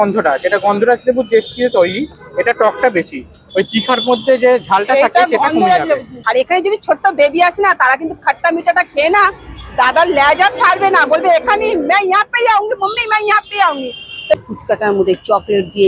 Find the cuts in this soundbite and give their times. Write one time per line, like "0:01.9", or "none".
0:06.1
0:14.3